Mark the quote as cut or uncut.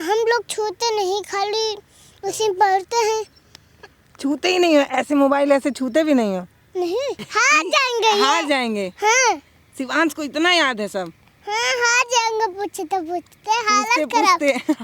cut